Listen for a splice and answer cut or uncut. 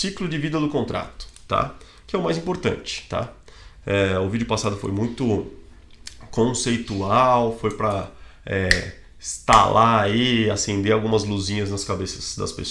uncut